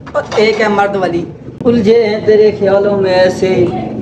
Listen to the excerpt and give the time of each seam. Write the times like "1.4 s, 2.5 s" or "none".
1.4 s